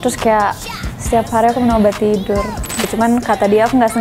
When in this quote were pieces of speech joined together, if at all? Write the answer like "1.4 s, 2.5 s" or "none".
2.9 s